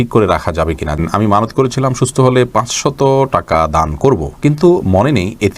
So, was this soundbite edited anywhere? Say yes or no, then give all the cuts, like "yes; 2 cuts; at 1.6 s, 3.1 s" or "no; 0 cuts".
yes; 1 cut; at 1.0 s